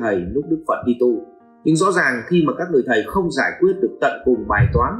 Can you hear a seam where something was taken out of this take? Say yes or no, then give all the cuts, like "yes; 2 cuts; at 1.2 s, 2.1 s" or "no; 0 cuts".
no; 0 cuts